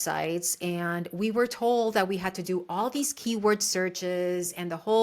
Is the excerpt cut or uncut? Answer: uncut